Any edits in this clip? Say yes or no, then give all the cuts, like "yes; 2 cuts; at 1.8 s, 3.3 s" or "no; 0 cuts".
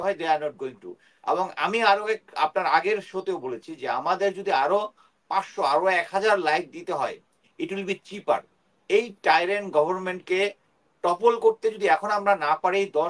no; 0 cuts